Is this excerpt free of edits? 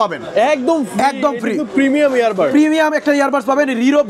yes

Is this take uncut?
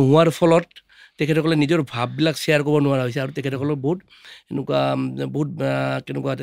yes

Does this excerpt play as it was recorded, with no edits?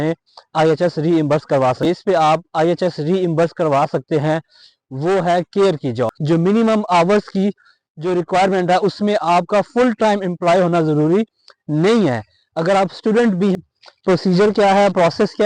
no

